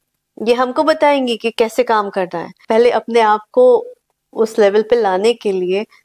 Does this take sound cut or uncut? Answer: cut